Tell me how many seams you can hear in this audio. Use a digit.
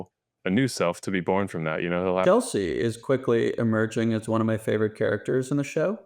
1